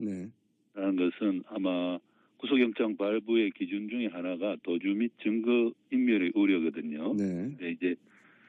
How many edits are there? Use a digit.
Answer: 1